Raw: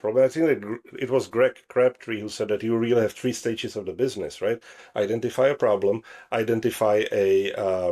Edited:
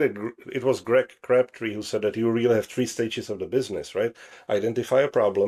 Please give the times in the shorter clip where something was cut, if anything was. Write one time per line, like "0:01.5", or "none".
none